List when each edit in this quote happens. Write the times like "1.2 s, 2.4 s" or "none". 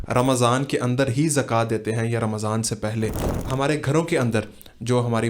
3.2 s